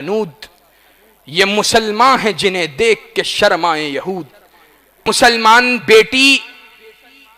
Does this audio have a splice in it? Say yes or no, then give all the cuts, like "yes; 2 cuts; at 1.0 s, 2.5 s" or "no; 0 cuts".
yes; 1 cut; at 5.0 s